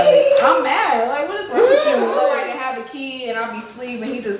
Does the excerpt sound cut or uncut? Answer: cut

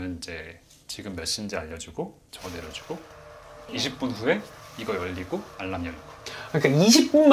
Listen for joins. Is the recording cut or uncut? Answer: uncut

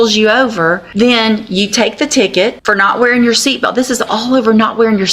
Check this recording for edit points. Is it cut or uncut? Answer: cut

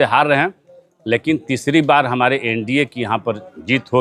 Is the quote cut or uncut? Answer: uncut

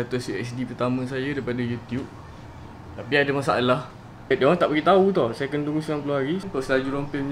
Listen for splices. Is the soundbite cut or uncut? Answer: cut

